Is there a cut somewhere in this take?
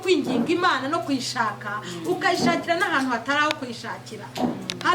no; 0 cuts

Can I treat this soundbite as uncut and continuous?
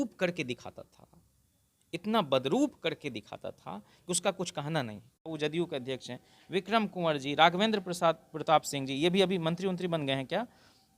no; 1 cut; at 5.2 s

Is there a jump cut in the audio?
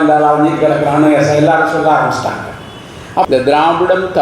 yes; 1 cut; at 3.3 s

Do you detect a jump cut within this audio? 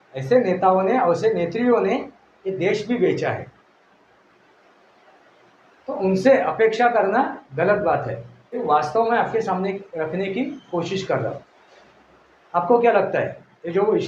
yes; 1 cut; at 8.6 s

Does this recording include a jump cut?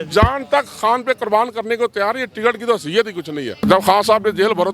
yes; 1 cut; at 3.6 s

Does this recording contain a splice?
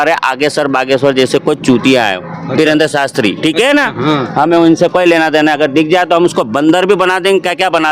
no; 0 cuts

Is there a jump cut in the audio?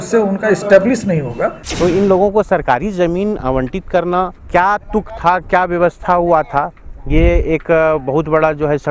yes; 2 cuts; at 1.6 s, 4.4 s

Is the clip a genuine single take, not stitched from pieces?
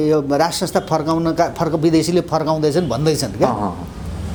yes; 0 cuts

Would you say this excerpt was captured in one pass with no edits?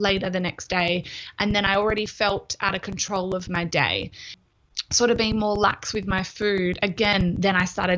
no; 1 cut; at 4.3 s

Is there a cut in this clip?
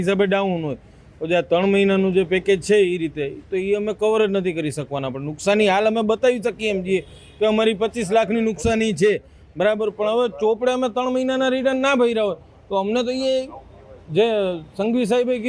no; 0 cuts

